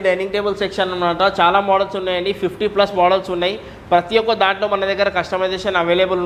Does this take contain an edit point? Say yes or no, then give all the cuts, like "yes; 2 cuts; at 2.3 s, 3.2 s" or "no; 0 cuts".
no; 0 cuts